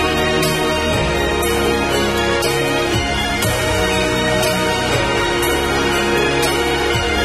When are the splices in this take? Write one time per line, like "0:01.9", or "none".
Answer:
0:01.0